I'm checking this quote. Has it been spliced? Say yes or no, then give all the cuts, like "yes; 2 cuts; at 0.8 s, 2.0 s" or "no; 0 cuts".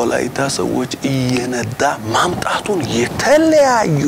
no; 0 cuts